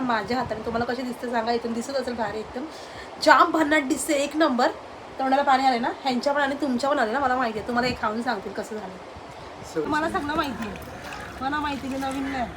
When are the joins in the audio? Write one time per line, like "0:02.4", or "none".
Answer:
0:09.8